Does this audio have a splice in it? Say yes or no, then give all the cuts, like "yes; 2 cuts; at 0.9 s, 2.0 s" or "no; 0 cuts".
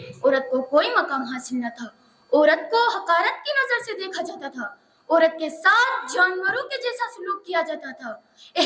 no; 0 cuts